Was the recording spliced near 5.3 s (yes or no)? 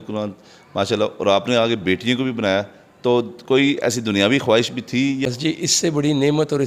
yes